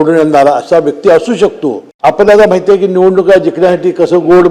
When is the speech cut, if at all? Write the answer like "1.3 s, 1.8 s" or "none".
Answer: none